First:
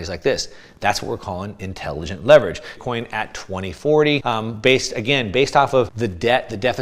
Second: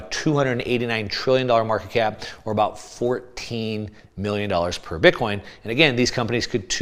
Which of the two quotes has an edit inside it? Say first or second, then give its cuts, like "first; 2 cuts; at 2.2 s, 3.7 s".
first; 3 cuts; at 2.7 s, 4.2 s, 5.9 s